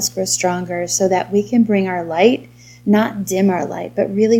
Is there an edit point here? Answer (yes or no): no